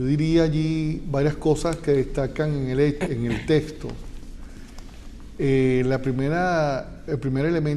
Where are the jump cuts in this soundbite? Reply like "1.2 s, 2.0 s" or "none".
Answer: none